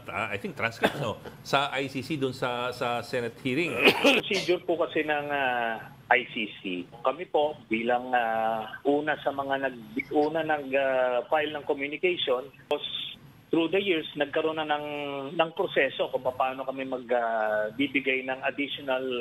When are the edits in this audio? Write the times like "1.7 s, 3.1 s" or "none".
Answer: 4.2 s, 7.0 s, 12.7 s